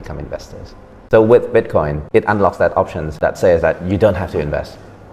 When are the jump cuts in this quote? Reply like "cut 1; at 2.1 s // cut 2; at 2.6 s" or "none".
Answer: cut 1; at 1.0 s // cut 2; at 2.0 s // cut 3; at 3.2 s